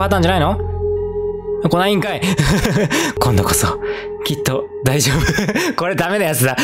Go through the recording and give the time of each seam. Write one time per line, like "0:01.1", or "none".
0:03.1